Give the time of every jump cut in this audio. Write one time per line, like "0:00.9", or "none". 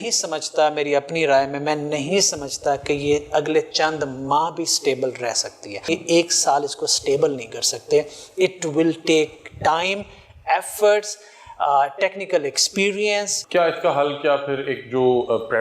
0:05.8
0:13.4

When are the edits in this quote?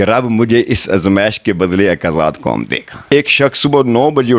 0:03.0

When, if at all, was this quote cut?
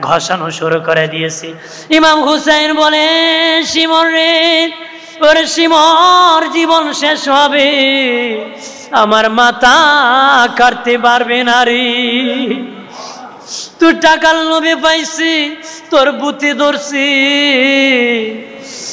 none

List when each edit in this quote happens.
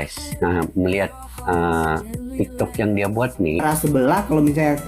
0:03.6

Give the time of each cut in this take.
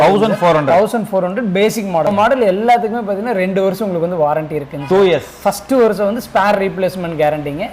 0:02.1

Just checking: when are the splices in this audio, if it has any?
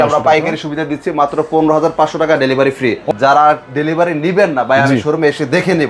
0:03.0

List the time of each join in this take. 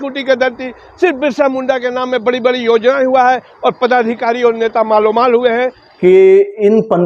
0:05.9

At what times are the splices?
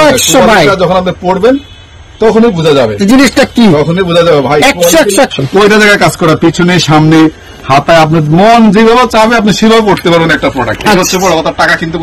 0:05.3

